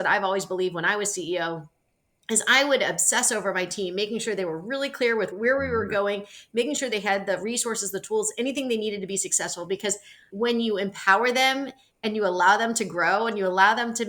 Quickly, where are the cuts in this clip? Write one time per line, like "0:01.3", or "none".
0:10.3